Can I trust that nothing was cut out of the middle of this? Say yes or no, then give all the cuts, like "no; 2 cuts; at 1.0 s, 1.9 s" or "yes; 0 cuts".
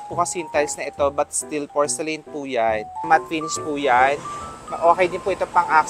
no; 1 cut; at 3.1 s